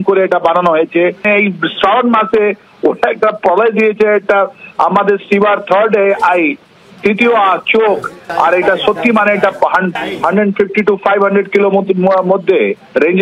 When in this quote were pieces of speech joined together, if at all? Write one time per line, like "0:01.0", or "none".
0:01.3